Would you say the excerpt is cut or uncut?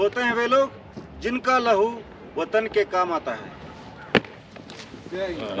uncut